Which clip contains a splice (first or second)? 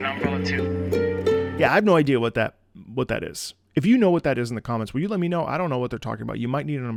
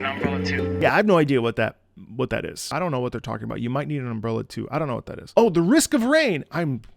second